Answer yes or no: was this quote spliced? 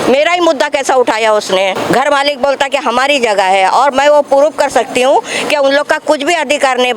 yes